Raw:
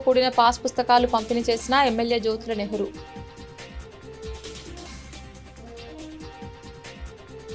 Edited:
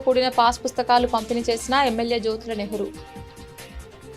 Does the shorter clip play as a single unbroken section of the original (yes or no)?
no